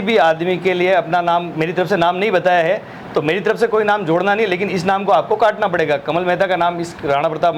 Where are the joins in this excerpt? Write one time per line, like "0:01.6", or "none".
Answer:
none